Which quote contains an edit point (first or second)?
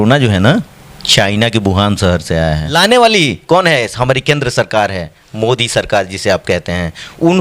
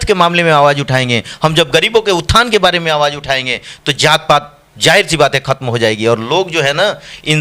first